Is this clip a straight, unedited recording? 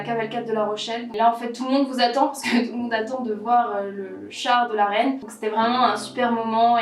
no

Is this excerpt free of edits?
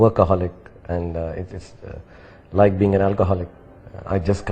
yes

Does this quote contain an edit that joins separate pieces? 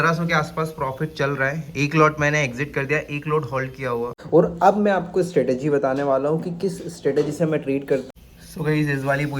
yes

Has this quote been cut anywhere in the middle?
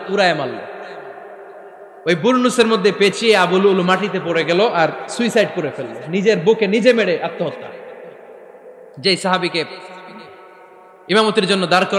no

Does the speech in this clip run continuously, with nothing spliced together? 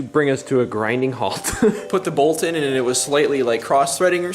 no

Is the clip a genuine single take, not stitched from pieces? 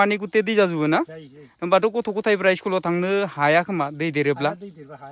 yes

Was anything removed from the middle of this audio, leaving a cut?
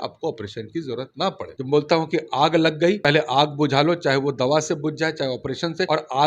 yes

